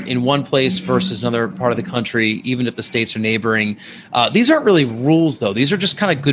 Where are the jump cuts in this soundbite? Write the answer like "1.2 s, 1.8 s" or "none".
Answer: none